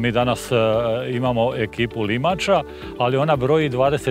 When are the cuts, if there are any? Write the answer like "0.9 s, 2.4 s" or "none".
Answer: none

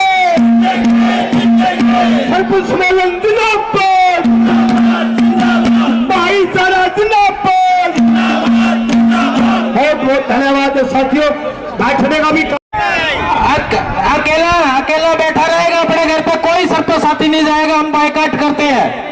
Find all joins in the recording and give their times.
12.7 s

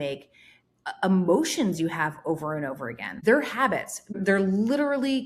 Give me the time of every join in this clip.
3.0 s, 4.1 s

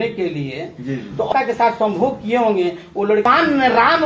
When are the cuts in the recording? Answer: 1.3 s, 3.3 s

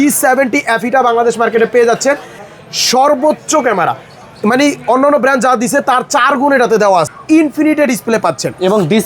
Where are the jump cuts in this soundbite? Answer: 2.4 s, 7.1 s

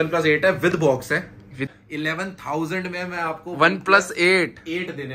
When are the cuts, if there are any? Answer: 1.7 s

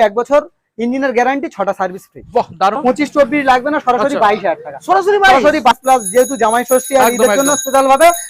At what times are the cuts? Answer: 2.8 s, 5.7 s

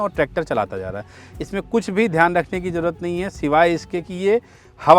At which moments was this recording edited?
none

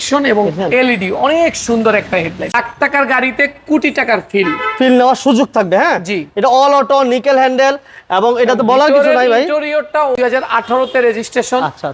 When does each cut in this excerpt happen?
2.5 s, 10.2 s

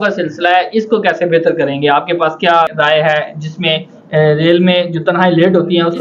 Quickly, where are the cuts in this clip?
2.7 s

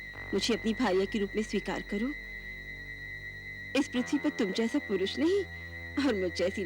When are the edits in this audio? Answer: none

